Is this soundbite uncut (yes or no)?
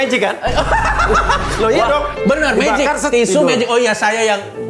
yes